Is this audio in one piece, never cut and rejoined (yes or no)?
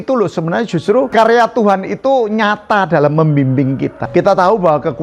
no